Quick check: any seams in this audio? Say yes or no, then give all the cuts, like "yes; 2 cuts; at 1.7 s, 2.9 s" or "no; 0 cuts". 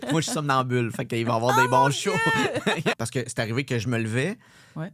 yes; 1 cut; at 2.9 s